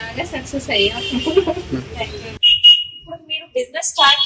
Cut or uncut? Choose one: uncut